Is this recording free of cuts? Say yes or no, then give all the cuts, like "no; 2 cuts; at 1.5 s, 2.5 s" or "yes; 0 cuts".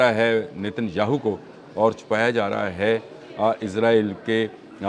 yes; 0 cuts